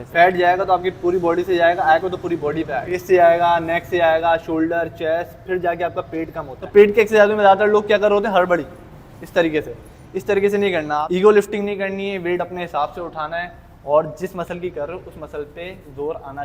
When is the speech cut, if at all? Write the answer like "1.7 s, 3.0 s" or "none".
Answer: 3.0 s, 6.5 s, 11.0 s